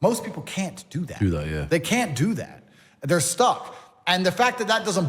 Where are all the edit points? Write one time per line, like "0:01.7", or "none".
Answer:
none